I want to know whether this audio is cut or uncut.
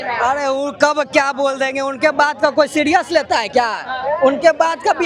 uncut